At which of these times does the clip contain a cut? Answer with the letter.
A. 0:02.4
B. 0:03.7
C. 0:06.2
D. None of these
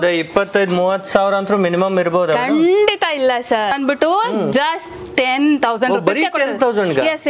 B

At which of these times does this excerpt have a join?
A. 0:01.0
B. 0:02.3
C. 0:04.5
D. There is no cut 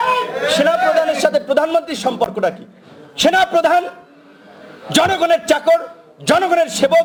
D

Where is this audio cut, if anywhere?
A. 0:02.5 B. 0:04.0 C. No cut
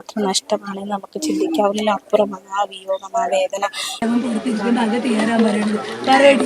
B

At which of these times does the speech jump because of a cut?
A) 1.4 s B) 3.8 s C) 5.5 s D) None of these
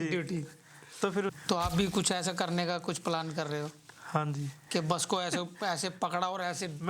A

